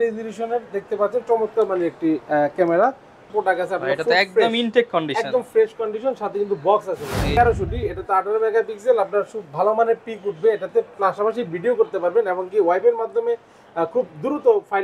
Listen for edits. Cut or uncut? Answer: cut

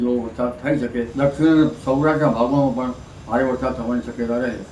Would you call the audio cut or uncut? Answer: cut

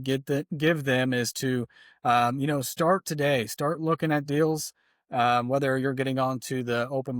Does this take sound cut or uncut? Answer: uncut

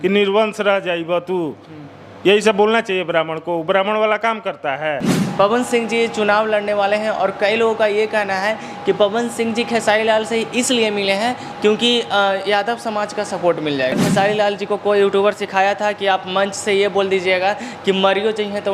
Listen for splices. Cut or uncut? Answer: cut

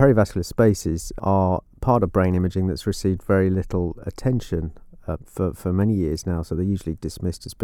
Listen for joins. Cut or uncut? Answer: cut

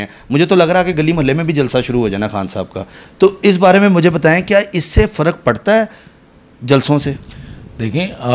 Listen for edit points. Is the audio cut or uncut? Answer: uncut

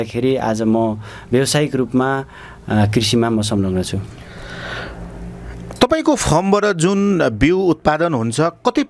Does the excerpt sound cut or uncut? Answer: uncut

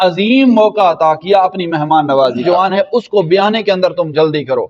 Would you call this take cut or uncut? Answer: cut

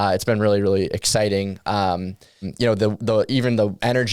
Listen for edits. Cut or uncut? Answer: cut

